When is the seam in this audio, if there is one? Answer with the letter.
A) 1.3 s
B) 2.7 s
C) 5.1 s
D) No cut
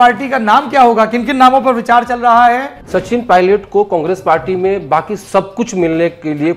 B